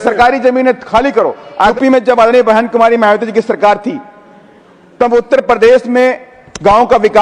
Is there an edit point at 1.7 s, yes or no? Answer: yes